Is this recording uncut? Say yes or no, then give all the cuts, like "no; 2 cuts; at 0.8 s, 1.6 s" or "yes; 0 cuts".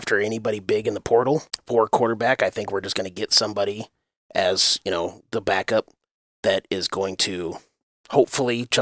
yes; 0 cuts